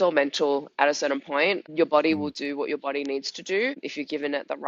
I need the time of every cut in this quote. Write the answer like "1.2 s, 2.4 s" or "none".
1.7 s, 3.9 s